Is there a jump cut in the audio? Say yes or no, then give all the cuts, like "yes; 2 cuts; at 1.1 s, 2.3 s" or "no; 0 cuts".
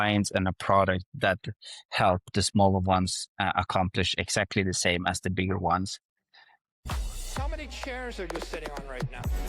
yes; 1 cut; at 6.8 s